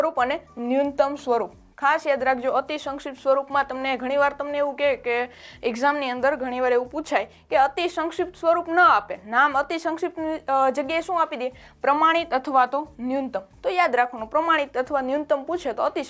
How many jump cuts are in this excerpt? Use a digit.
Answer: 0